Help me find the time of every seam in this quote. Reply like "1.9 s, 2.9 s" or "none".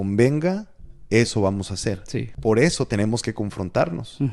2.3 s